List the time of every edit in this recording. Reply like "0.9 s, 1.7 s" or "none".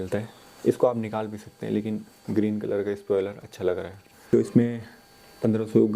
4.3 s